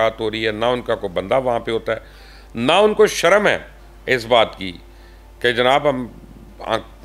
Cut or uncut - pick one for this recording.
uncut